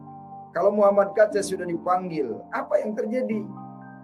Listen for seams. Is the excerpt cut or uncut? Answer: uncut